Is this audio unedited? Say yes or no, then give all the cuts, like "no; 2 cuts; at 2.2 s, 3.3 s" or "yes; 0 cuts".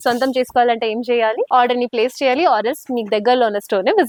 yes; 0 cuts